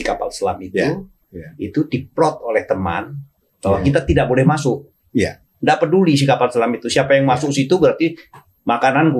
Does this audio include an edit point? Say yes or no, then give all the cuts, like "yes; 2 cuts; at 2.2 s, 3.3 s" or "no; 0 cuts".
no; 0 cuts